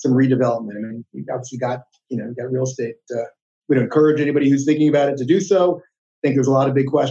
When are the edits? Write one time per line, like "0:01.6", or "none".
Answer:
0:03.4